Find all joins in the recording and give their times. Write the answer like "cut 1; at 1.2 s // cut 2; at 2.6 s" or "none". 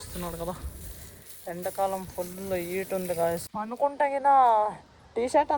cut 1; at 3.5 s